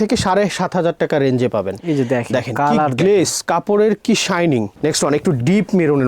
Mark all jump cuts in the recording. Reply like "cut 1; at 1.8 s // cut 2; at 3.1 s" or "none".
cut 1; at 1.8 s // cut 2; at 4.7 s